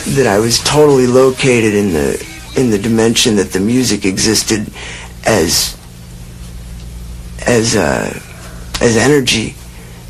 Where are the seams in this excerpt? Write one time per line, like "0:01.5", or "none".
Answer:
0:06.6